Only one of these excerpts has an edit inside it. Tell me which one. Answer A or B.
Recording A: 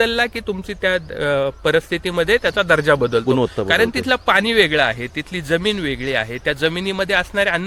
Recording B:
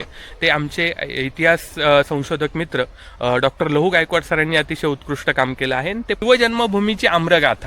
B